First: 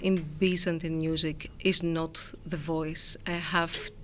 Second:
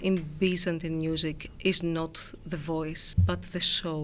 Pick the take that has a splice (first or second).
second